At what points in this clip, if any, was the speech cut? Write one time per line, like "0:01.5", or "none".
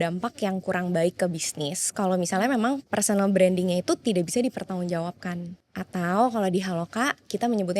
0:02.8
0:05.5